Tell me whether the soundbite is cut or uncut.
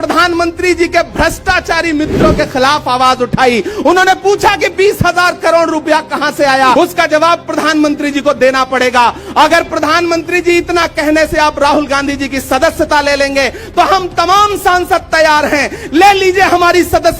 cut